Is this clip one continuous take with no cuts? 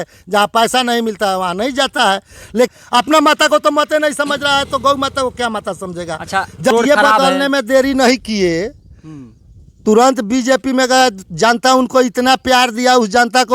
no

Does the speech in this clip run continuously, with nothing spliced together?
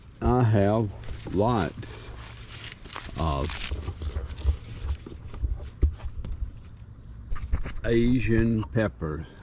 yes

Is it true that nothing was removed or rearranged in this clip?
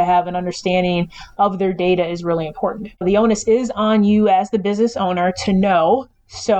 no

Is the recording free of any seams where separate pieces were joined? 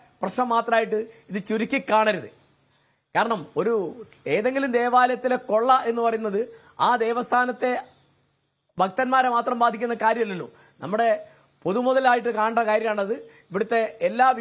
yes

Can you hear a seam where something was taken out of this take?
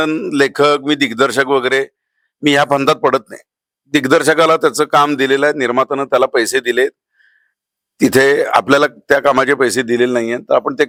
no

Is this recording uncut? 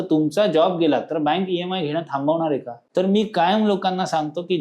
no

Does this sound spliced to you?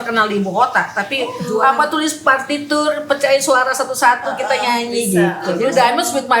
yes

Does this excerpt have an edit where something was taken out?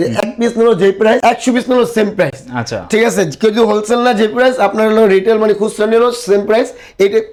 no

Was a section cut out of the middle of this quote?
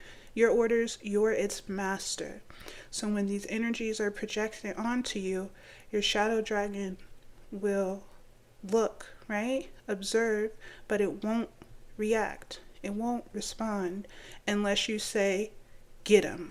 no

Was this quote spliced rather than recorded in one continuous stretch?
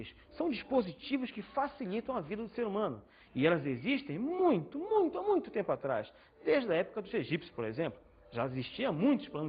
no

